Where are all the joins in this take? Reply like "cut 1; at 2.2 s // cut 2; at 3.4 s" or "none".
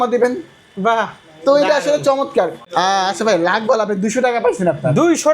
cut 1; at 2.6 s